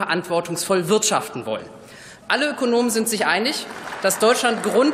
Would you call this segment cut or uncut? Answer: uncut